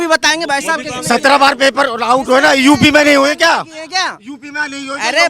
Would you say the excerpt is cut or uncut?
uncut